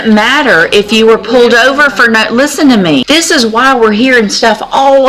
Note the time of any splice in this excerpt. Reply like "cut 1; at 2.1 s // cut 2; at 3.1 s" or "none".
cut 1; at 3.0 s